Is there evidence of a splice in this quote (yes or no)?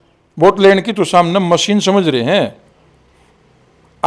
no